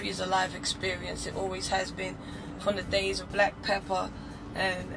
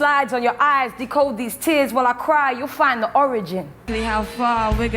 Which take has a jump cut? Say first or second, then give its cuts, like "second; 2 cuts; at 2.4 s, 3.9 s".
second; 1 cut; at 3.8 s